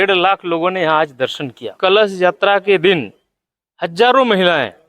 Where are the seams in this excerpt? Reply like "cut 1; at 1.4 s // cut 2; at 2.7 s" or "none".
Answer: cut 1; at 1.7 s